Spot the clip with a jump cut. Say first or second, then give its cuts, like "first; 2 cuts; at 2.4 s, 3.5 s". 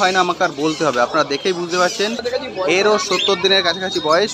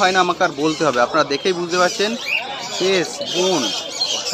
first; 1 cut; at 2.2 s